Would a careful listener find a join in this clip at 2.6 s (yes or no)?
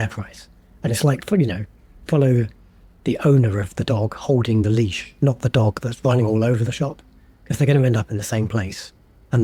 no